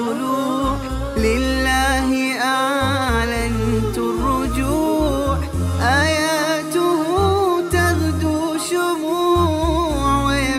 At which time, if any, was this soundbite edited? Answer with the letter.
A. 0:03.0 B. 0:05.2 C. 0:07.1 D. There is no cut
D